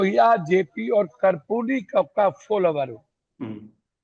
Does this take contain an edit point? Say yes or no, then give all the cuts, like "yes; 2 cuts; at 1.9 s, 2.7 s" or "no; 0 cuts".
no; 0 cuts